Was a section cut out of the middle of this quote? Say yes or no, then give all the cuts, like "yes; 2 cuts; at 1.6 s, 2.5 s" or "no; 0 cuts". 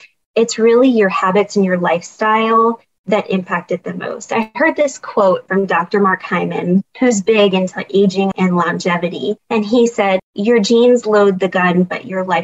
yes; 5 cuts; at 5.5 s, 6.9 s, 8.3 s, 9.4 s, 10.2 s